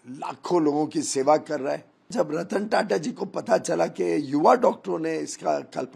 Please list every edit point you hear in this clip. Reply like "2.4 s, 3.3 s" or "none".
2.1 s